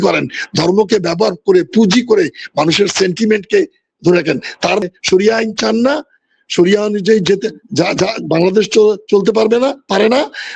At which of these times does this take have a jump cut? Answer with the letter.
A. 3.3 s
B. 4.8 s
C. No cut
B